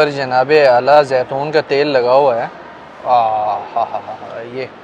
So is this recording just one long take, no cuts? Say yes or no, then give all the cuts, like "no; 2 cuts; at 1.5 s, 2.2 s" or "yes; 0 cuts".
yes; 0 cuts